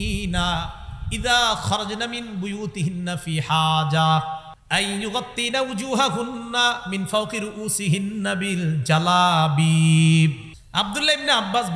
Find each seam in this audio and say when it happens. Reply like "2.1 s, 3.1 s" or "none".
4.5 s, 10.5 s